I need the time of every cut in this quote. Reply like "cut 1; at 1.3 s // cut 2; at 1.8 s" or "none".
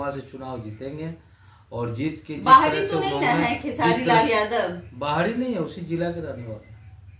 none